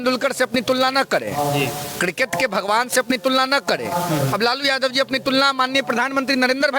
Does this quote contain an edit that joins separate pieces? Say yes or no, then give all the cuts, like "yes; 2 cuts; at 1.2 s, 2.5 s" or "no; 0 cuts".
no; 0 cuts